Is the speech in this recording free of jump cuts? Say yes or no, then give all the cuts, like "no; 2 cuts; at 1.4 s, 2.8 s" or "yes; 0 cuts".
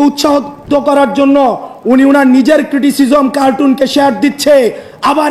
yes; 0 cuts